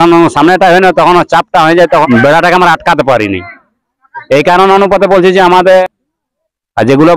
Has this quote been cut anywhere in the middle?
yes; 2 cuts; at 2.0 s, 5.8 s

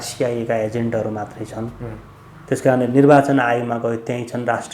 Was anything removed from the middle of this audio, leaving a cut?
no; 0 cuts

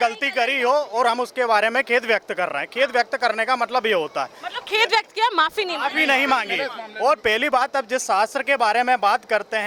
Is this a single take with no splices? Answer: yes; 0 cuts

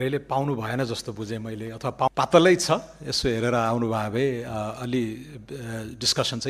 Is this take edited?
yes; 1 cut; at 2.1 s

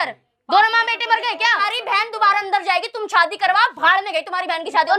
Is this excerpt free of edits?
no; 1 cut; at 1.6 s

